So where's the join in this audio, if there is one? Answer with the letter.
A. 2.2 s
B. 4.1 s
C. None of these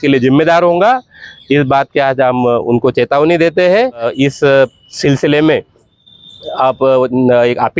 B